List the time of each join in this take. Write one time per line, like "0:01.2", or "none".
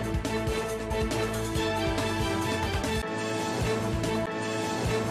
0:01.2